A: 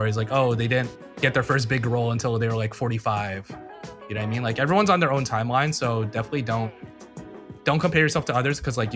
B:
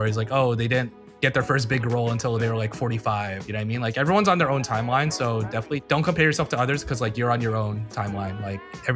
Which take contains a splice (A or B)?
B